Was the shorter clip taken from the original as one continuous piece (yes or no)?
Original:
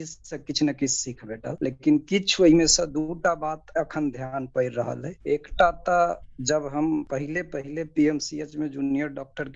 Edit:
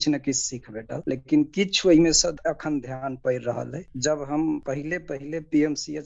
no